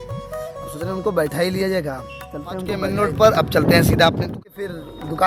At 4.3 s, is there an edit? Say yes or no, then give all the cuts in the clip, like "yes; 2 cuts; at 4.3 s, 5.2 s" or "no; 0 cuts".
yes; 2 cuts; at 2.9 s, 4.3 s